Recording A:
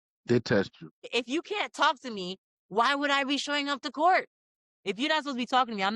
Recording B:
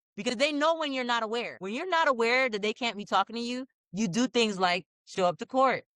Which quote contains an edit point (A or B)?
B